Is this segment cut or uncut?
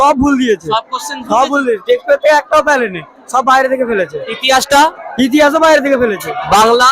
cut